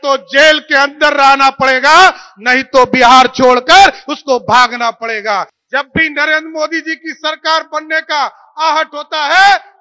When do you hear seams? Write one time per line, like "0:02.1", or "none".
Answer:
0:05.6